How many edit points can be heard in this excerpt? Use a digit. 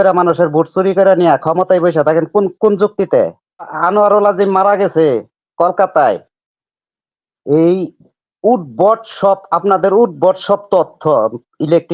1